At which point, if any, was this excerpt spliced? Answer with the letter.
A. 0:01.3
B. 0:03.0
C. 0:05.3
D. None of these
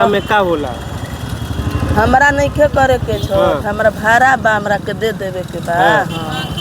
D